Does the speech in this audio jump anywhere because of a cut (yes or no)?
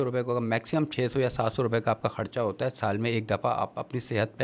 no